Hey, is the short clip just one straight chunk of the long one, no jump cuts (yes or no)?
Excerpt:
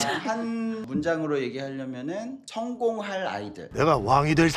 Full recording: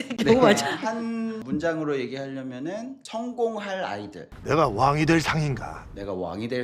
no